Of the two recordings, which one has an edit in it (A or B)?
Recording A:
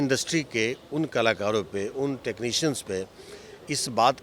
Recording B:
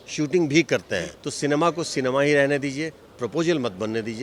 B